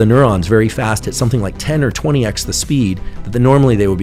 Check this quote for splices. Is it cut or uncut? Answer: uncut